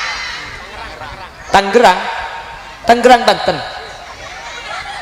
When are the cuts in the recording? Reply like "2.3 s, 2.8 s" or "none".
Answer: none